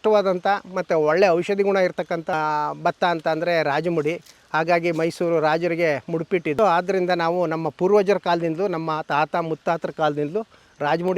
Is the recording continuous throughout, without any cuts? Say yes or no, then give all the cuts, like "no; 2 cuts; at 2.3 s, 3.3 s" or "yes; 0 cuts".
no; 2 cuts; at 2.3 s, 6.6 s